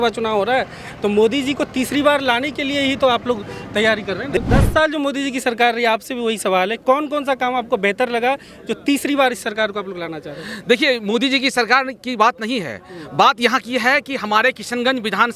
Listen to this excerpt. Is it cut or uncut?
cut